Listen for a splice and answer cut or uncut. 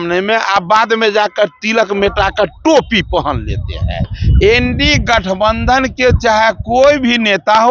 cut